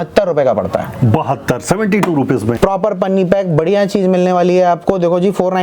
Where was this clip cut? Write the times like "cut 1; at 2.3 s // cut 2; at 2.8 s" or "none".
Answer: cut 1; at 2.5 s